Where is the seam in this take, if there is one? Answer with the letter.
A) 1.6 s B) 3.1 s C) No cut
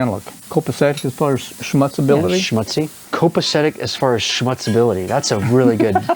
B